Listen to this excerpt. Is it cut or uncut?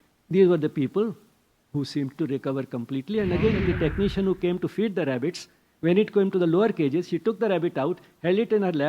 cut